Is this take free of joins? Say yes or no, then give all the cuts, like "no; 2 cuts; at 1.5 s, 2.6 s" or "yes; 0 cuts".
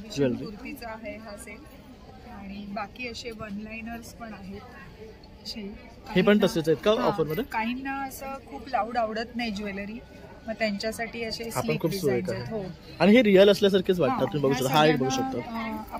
yes; 0 cuts